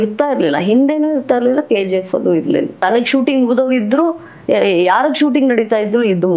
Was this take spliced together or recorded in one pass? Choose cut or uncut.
cut